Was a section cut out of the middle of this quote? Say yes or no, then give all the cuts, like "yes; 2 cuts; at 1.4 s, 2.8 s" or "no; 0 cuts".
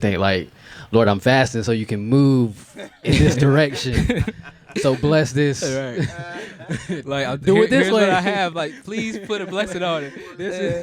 no; 0 cuts